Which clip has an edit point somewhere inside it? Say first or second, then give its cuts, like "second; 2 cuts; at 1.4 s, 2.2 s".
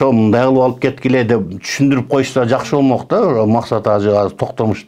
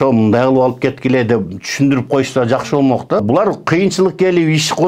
second; 1 cut; at 3.2 s